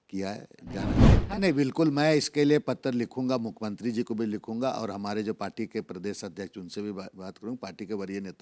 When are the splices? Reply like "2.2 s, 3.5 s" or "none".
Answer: 1.1 s